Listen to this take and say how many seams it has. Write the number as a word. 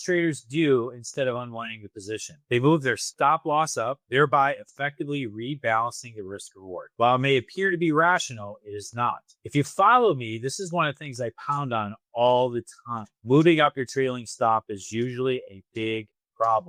zero